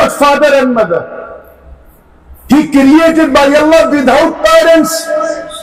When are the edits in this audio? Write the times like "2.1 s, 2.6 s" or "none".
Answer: none